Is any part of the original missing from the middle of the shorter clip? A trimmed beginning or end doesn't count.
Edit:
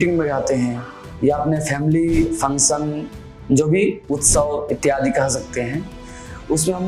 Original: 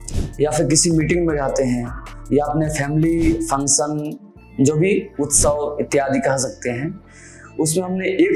no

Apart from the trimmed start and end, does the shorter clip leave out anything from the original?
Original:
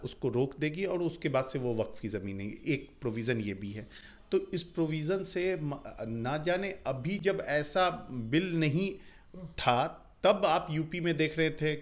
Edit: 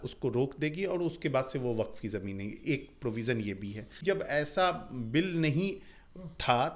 yes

